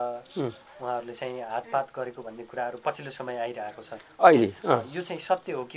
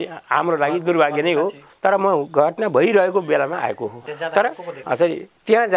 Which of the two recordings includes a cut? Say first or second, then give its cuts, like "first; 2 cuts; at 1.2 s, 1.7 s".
second; 3 cuts; at 1.6 s, 4.0 s, 4.7 s